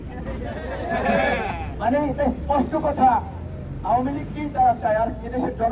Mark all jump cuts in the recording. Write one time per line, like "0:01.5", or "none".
none